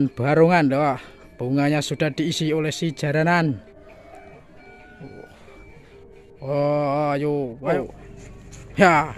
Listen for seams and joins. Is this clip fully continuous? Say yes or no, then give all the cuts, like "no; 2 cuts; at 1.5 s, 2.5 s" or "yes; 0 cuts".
no; 1 cut; at 7.7 s